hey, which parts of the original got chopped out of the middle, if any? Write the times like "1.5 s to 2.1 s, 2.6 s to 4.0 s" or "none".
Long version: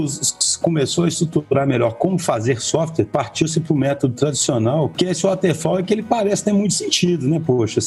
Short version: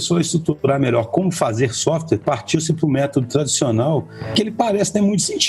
5.1 s to 5.7 s